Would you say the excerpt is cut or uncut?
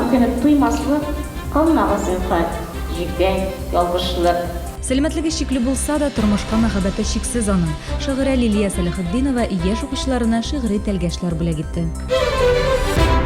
cut